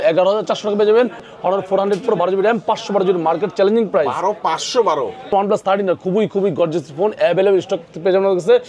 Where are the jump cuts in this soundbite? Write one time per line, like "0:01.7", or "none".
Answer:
0:01.3
0:05.3